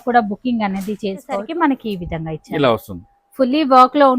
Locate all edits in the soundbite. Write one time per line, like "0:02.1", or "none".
0:01.5